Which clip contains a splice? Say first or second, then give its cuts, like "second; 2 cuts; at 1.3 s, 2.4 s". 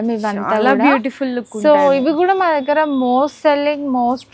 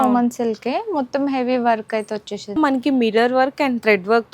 second; 1 cut; at 2.6 s